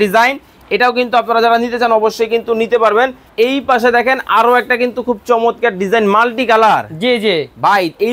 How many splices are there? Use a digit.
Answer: 1